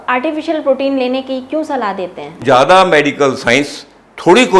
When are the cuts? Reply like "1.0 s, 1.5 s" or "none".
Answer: 2.4 s